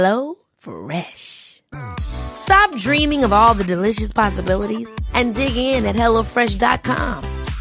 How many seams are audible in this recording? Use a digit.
0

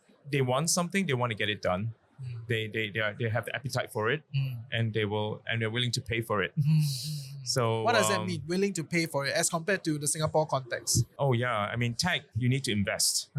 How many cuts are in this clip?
0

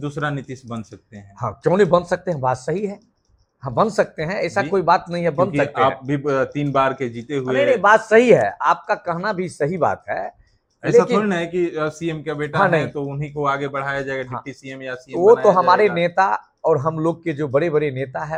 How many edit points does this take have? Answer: 0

